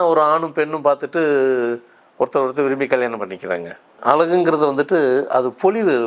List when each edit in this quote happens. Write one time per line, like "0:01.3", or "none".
0:04.0